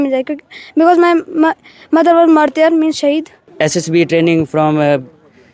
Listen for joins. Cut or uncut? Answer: cut